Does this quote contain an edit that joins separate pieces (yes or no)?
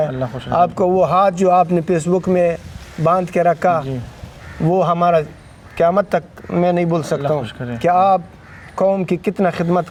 no